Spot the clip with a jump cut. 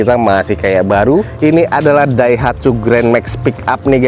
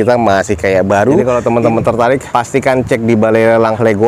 second; 1 cut; at 1.2 s

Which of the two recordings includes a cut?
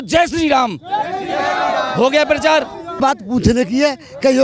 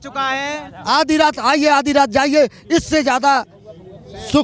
first; 1 cut; at 3.0 s

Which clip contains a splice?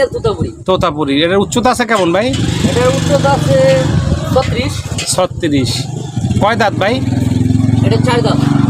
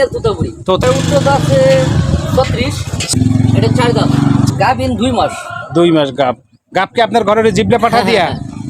second; 3 cuts; at 0.8 s, 3.1 s, 4.5 s

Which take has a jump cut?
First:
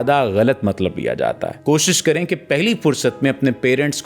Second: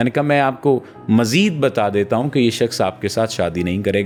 first; 1 cut; at 1.5 s

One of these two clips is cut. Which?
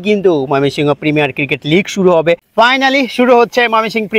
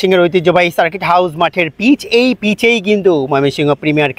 first; 1 cut; at 2.5 s

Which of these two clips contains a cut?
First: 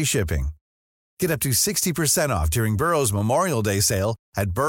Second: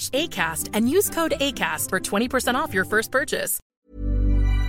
second; 1 cut; at 3.7 s

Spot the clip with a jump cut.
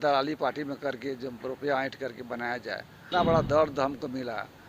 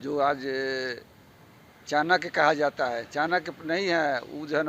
first; 1 cut; at 3.1 s

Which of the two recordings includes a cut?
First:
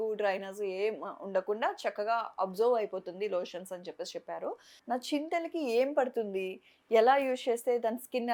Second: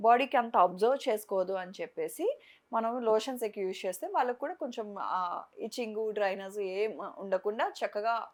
first; 1 cut; at 4.7 s

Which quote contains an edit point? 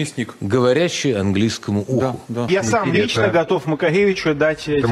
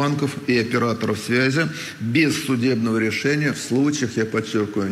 first; 1 cut; at 2.5 s

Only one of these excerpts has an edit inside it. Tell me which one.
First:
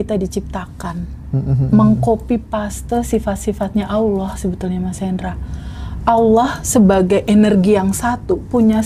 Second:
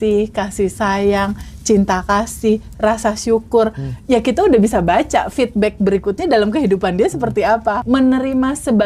second; 1 cut; at 7.8 s

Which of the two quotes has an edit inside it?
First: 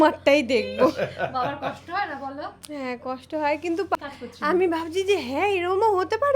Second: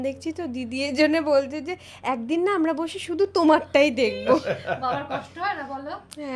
first; 1 cut; at 4.0 s

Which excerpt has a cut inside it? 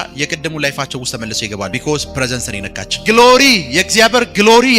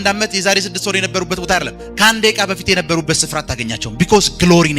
first; 2 cuts; at 1.7 s, 2.8 s

